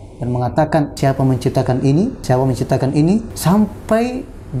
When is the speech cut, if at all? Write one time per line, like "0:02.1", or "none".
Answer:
0:00.9
0:02.2
0:03.3